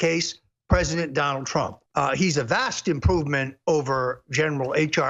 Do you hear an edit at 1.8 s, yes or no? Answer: yes